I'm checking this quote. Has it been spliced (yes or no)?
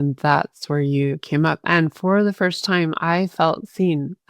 yes